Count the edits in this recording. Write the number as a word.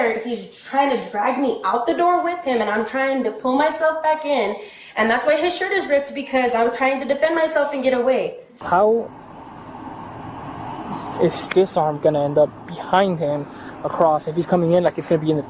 one